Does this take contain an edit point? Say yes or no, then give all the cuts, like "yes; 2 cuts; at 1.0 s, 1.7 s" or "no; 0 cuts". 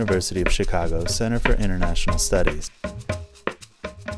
yes; 1 cut; at 3.1 s